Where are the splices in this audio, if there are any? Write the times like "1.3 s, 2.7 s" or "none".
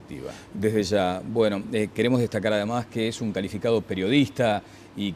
1.7 s